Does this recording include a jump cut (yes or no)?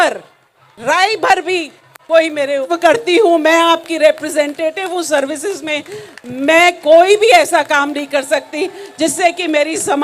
yes